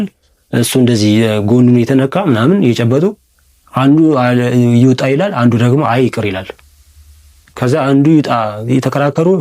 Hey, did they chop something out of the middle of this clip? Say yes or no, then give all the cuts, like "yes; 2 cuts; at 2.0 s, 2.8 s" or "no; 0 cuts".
no; 0 cuts